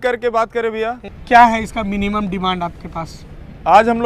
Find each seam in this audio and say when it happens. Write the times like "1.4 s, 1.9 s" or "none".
1.1 s